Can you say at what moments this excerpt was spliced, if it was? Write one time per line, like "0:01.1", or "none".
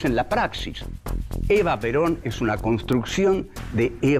0:02.3

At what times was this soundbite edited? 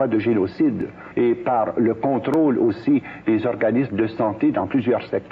0:01.0

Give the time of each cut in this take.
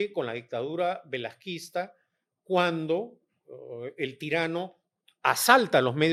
none

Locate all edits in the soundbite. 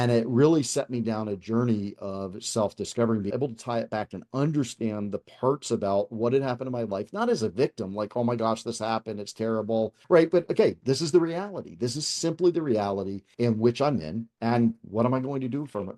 none

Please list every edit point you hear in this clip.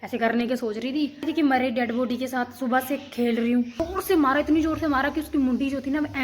0:01.2
0:03.8

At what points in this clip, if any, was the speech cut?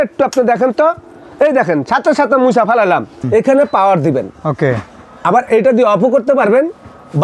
0:03.1

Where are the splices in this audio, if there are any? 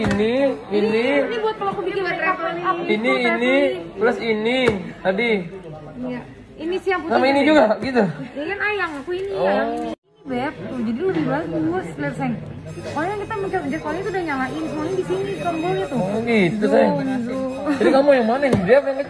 0:10.1

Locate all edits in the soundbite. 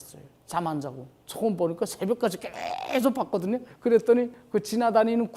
none

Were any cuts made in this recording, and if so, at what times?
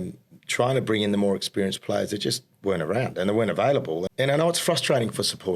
0:04.1

